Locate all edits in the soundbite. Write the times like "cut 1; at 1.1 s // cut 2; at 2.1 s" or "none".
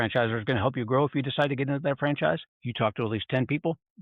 cut 1; at 2.6 s